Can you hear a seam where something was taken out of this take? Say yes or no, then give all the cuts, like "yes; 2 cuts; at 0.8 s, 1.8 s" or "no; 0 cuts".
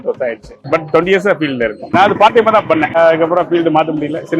yes; 2 cuts; at 1.9 s, 2.9 s